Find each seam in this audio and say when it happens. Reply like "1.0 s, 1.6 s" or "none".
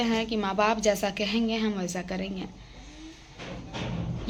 none

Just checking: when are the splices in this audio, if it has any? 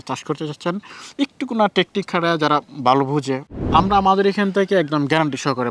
3.5 s

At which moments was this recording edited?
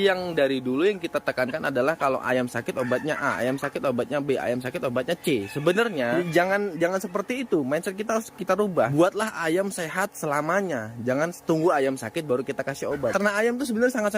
13.1 s

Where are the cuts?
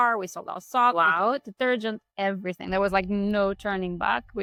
none

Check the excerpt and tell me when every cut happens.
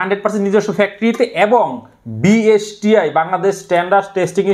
none

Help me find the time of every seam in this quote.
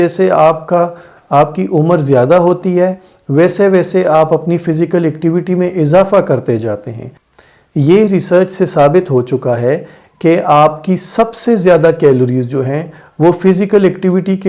7.1 s

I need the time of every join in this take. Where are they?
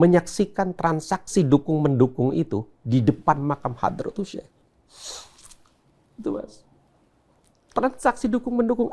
none

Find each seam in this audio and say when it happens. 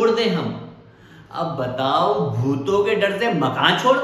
none

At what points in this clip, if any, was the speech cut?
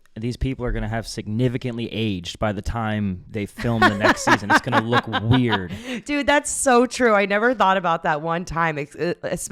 none

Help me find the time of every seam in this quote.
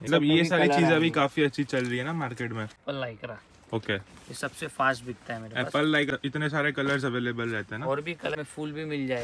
2.8 s, 6.1 s, 8.4 s

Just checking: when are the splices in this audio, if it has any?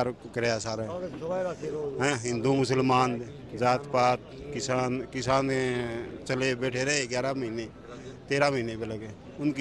none

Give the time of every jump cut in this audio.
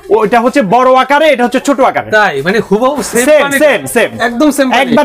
none

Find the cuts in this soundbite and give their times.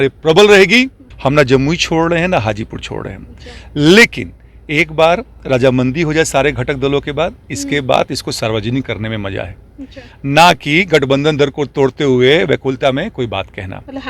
1.0 s

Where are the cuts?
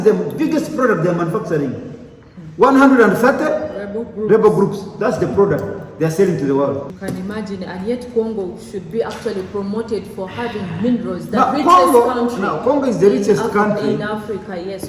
7.0 s

